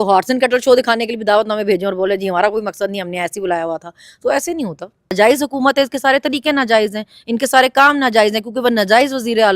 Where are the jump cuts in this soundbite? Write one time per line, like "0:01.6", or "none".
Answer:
0:05.1